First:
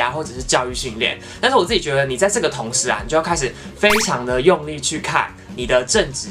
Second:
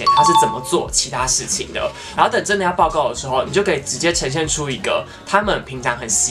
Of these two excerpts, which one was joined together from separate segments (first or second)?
second